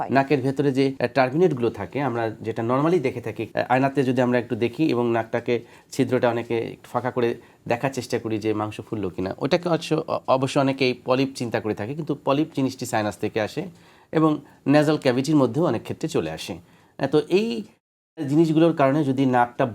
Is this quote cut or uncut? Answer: cut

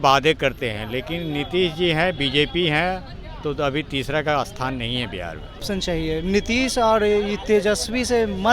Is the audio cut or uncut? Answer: cut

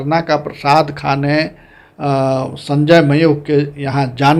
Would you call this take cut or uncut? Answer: uncut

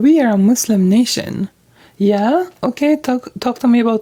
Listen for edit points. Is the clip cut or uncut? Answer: uncut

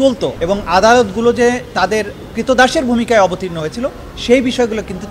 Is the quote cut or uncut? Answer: uncut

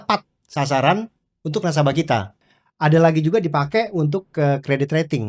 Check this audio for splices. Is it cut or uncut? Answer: cut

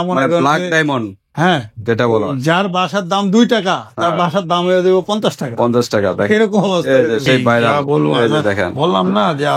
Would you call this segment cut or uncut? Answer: cut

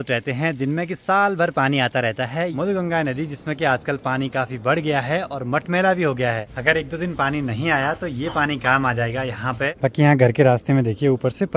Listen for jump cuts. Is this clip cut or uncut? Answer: cut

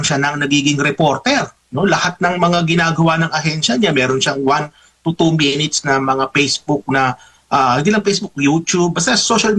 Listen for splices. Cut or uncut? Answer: uncut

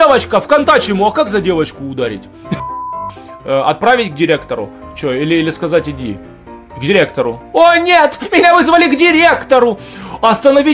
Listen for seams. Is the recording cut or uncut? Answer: cut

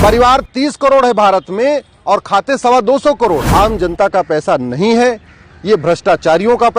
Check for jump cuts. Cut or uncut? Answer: cut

